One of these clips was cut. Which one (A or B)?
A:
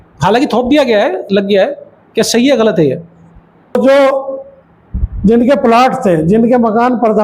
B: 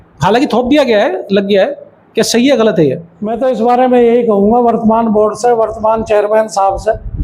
A